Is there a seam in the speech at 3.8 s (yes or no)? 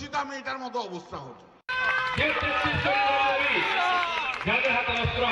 no